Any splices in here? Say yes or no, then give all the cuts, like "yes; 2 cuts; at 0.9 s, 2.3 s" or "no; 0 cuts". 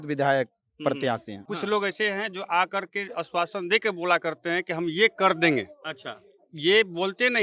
yes; 1 cut; at 1.5 s